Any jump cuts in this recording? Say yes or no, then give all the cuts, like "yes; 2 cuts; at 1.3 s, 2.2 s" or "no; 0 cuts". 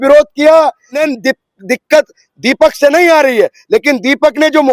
yes; 1 cut; at 1.0 s